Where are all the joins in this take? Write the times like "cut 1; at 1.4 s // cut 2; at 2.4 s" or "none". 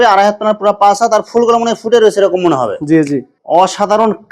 cut 1; at 3.3 s